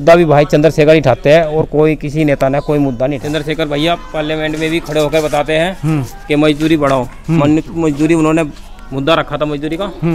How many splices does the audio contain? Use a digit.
1